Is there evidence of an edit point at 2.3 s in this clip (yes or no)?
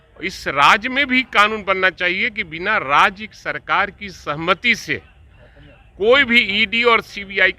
no